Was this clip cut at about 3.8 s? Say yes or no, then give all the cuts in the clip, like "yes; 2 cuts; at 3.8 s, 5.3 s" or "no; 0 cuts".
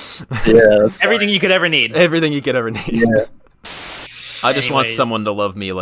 yes; 1 cut; at 3.8 s